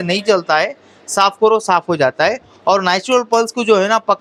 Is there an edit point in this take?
no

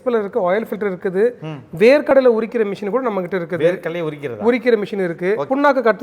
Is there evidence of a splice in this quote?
no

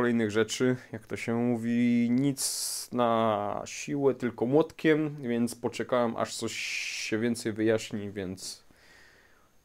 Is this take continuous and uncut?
yes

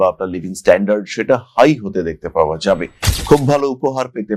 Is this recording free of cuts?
yes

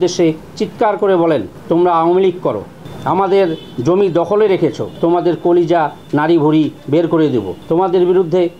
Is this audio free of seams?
no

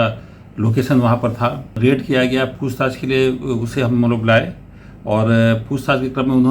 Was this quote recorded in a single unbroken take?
no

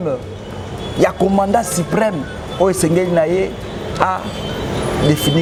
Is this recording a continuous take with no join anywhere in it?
yes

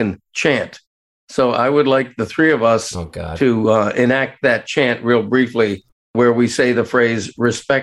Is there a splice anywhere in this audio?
yes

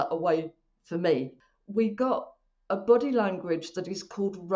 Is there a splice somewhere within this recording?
yes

